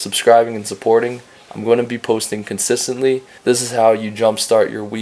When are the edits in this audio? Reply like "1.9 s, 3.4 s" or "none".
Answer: 3.3 s